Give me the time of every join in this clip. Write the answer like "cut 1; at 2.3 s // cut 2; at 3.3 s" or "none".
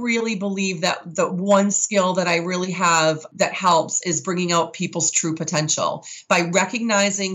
cut 1; at 3.3 s